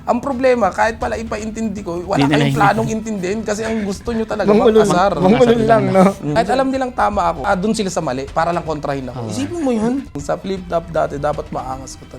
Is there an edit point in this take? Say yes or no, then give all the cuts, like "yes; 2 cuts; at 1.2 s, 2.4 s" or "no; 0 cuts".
yes; 3 cuts; at 6.3 s, 7.4 s, 10.1 s